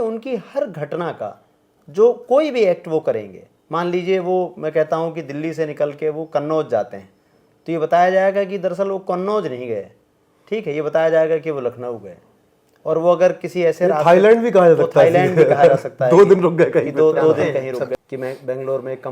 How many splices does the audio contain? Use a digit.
1